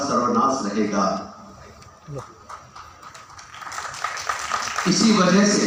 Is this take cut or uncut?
uncut